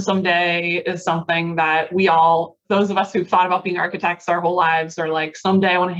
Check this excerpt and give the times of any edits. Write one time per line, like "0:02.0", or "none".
0:02.6